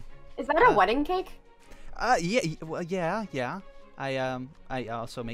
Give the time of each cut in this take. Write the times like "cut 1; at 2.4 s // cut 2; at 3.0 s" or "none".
none